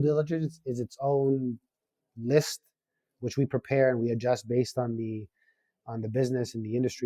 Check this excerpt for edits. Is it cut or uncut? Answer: uncut